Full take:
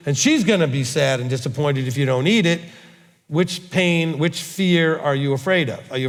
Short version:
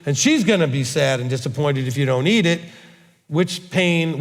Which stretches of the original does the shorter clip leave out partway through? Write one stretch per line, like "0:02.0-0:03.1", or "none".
none